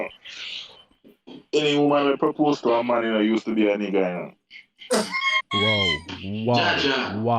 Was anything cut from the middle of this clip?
no; 0 cuts

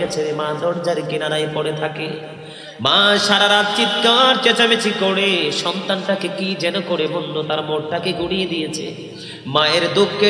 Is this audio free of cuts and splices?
yes; 0 cuts

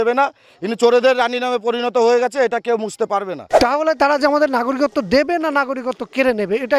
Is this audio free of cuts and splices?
no; 1 cut; at 3.5 s

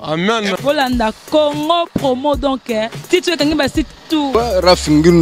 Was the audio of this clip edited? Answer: yes; 1 cut; at 4.3 s

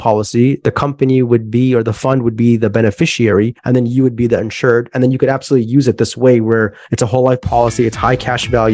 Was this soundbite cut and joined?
no; 0 cuts

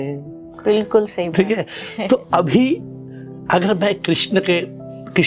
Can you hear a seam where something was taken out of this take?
no; 0 cuts

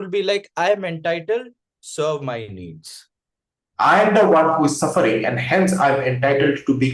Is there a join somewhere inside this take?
yes; 1 cut; at 3.6 s

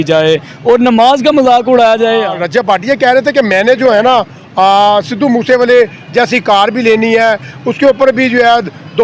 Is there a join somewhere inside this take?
yes; 1 cut; at 2.4 s

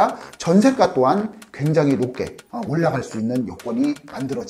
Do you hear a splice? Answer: no; 0 cuts

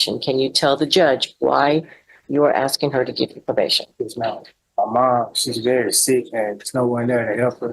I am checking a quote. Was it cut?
yes; 1 cut; at 4.6 s

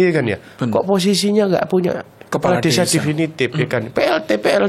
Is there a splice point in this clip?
no; 0 cuts

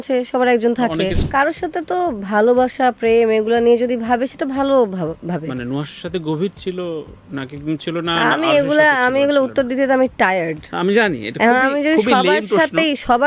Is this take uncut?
no; 1 cut; at 1.2 s

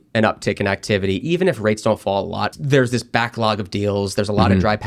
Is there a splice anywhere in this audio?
yes; 1 cut; at 2.5 s

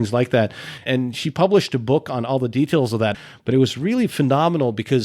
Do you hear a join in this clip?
yes; 1 cut; at 3.2 s

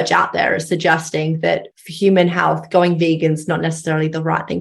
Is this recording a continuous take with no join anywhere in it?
no; 1 cut; at 1.8 s

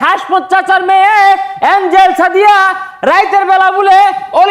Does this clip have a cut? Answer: no; 0 cuts

